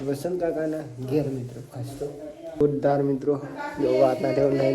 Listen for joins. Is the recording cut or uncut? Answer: cut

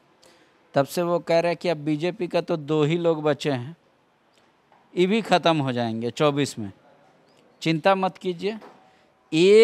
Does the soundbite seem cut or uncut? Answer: uncut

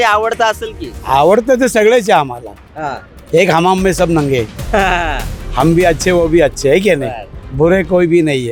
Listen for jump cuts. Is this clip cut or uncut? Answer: uncut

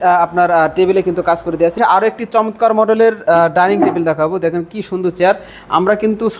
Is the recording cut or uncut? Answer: cut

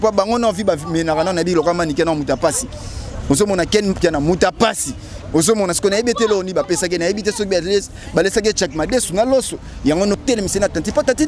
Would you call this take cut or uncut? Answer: cut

